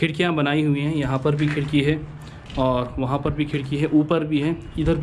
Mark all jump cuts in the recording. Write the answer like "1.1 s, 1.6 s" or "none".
none